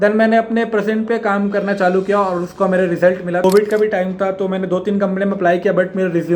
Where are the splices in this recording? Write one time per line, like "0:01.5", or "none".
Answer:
0:03.4